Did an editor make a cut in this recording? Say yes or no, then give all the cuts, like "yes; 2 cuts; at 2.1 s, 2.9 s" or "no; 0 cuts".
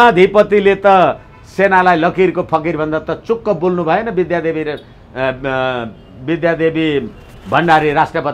no; 0 cuts